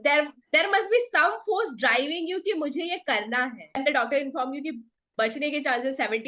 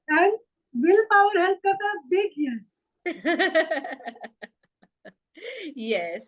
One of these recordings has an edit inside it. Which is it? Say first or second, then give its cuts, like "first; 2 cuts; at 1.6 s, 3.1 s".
first; 1 cut; at 3.8 s